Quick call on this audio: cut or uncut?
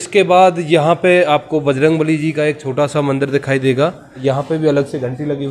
cut